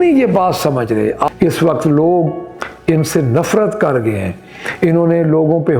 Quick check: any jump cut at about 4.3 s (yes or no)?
no